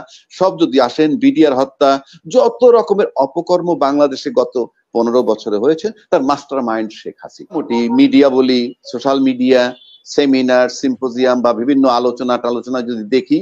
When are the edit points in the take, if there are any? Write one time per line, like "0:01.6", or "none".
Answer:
0:07.6